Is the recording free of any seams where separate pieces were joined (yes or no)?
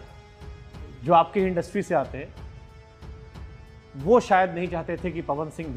yes